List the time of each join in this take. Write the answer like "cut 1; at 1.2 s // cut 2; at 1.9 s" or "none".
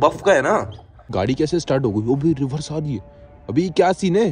cut 1; at 1.1 s // cut 2; at 3.3 s